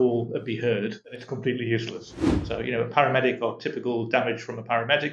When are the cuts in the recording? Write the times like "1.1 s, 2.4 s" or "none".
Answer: 2.1 s